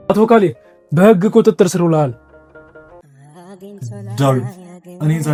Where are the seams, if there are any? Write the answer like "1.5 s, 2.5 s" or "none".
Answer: none